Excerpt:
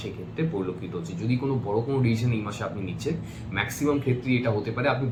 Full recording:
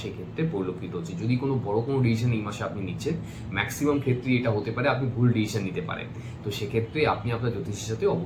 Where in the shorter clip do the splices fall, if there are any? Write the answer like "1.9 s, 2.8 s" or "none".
none

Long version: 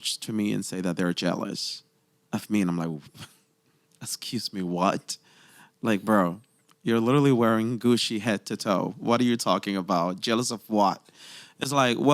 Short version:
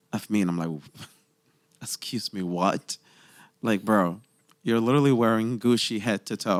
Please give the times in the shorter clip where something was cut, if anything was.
none

